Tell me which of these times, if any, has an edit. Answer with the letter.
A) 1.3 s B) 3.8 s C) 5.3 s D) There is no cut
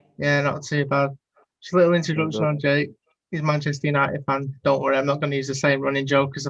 D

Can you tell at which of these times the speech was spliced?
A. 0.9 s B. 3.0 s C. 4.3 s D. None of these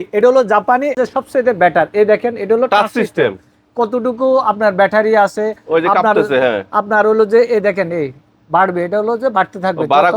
A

